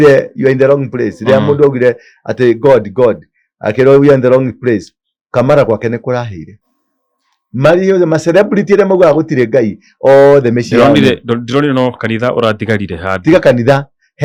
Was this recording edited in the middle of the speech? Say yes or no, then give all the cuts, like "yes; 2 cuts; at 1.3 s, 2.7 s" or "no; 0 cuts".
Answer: no; 0 cuts